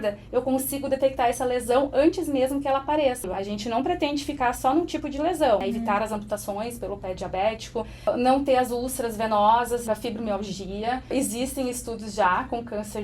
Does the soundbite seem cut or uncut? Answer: cut